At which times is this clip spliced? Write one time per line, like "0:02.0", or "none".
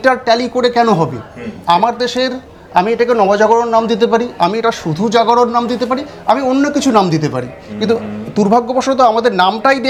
none